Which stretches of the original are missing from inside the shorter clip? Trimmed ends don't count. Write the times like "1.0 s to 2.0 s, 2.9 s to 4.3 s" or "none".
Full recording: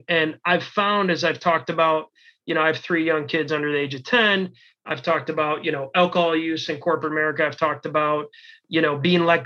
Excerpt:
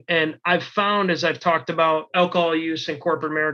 2.1 s to 5.9 s